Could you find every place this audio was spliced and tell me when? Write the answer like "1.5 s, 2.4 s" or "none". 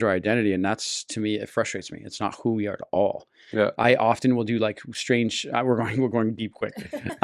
none